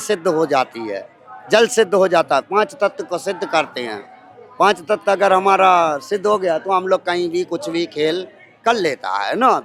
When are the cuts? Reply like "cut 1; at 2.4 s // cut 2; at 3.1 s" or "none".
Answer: none